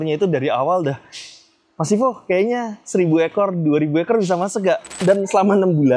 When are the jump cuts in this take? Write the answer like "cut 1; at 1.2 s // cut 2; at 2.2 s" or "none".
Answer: cut 1; at 5.0 s